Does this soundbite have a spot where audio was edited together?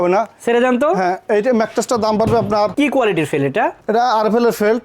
yes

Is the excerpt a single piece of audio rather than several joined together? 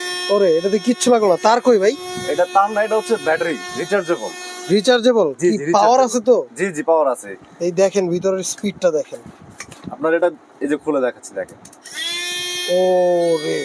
yes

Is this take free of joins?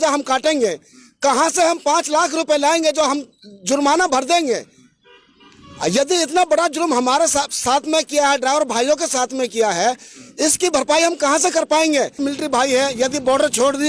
no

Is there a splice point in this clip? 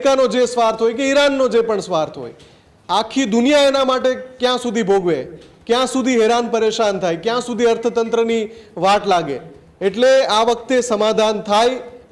no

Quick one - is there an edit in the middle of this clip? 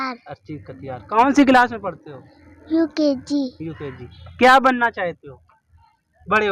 no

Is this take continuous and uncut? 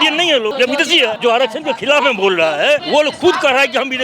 no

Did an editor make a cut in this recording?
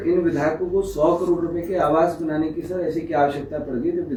no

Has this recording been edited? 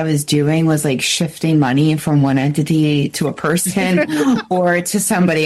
no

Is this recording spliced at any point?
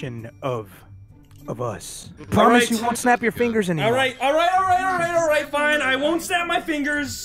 yes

